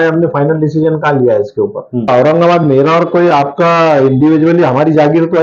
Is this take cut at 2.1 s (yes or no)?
yes